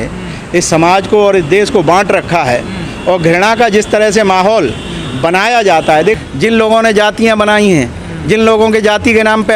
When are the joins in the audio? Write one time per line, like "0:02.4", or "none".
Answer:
0:06.2